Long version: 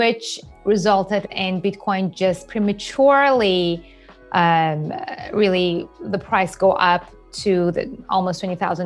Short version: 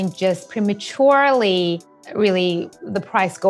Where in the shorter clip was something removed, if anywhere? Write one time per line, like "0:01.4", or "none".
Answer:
0:02.0